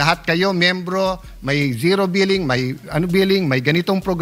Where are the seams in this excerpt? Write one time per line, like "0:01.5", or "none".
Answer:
none